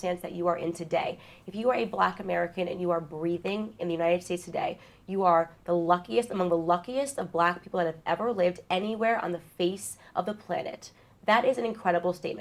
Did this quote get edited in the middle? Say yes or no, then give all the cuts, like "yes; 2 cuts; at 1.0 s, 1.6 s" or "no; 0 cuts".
no; 0 cuts